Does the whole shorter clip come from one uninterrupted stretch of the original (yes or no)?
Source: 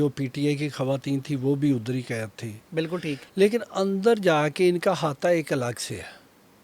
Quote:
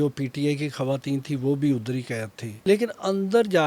no